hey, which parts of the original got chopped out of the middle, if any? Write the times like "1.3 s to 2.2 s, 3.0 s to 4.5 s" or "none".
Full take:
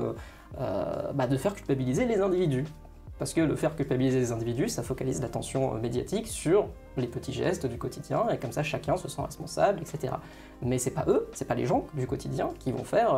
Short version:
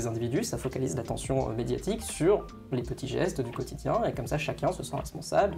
none